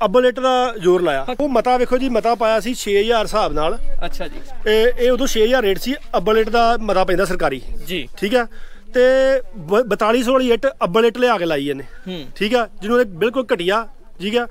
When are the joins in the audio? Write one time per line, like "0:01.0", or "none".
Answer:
0:01.4